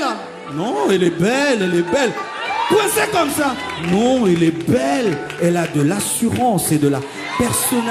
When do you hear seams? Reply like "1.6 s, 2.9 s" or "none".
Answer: none